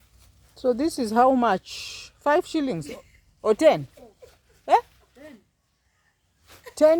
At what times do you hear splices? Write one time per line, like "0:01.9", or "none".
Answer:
none